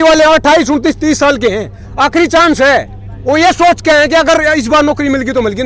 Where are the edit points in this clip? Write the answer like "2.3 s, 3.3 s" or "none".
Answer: none